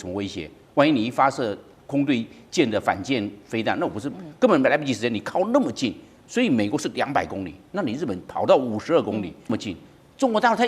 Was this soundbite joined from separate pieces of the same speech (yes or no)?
yes